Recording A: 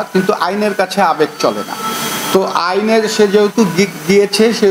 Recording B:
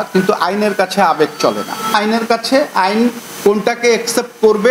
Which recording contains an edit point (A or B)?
B